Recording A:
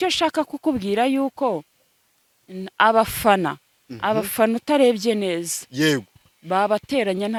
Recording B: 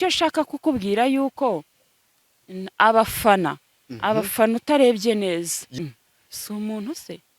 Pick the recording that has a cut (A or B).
B